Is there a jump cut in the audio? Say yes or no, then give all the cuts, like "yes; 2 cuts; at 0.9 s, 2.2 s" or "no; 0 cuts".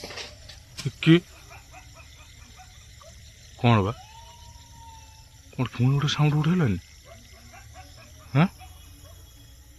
no; 0 cuts